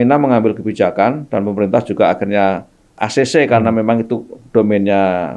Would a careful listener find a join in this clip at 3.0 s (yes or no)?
yes